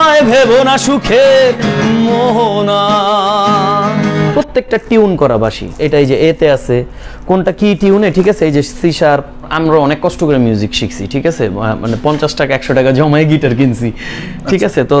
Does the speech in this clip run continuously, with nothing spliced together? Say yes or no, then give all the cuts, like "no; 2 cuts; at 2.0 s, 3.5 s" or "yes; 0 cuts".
no; 3 cuts; at 4.3 s, 5.7 s, 9.5 s